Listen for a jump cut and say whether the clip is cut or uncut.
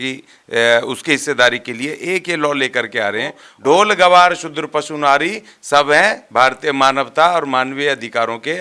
cut